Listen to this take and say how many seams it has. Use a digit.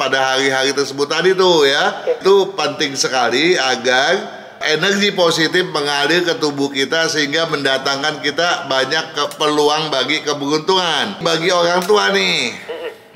2